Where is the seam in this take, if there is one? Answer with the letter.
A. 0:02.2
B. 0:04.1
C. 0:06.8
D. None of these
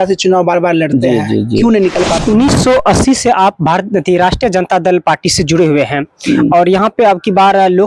A